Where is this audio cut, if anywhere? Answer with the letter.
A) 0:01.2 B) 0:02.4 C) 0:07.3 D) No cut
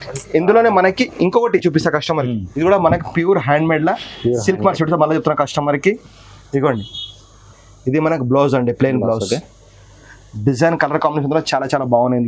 B